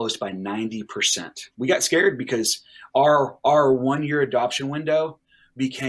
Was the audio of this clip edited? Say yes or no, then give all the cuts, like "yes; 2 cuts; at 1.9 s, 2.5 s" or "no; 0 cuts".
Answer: no; 0 cuts